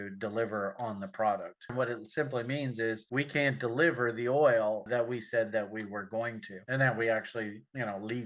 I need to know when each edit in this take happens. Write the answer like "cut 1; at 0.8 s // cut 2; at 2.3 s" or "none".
cut 1; at 1.7 s